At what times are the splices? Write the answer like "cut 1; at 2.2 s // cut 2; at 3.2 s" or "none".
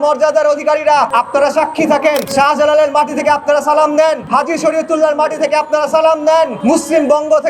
cut 1; at 1.1 s // cut 2; at 2.3 s // cut 3; at 4.2 s // cut 4; at 6.6 s